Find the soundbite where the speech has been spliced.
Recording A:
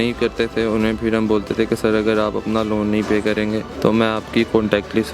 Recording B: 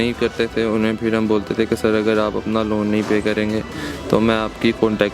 A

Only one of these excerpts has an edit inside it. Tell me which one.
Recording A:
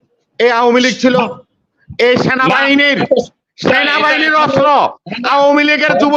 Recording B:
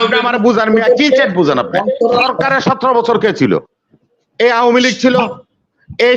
B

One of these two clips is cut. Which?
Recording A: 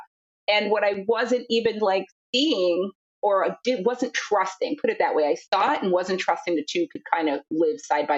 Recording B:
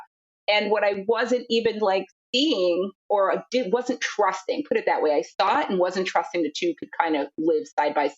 B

